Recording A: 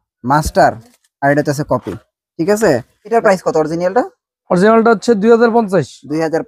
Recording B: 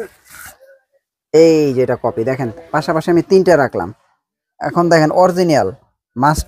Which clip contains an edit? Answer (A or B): A